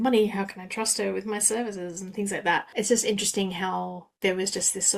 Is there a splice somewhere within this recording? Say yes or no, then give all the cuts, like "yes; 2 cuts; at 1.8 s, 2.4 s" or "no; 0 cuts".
yes; 1 cut; at 2.7 s